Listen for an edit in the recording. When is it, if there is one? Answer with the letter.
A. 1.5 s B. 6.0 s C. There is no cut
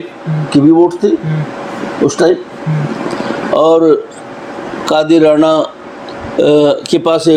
C